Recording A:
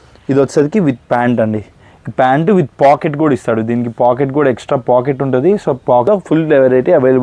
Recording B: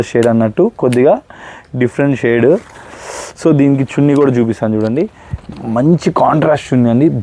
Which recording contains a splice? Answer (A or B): A